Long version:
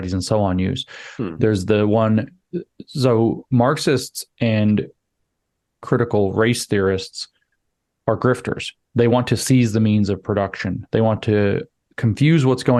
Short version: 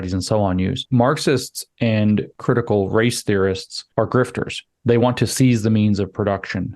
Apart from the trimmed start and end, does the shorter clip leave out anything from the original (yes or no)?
yes